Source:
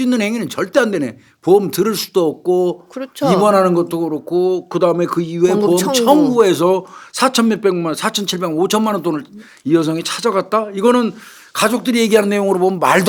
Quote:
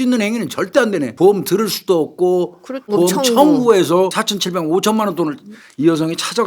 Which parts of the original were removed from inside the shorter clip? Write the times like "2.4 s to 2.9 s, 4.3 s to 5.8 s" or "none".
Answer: 1.1 s to 1.4 s, 3.2 s to 5.6 s, 6.9 s to 8.1 s